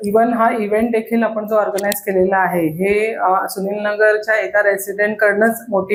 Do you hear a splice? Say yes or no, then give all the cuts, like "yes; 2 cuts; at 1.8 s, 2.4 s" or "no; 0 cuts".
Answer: no; 0 cuts